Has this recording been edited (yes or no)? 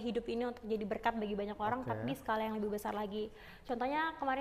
no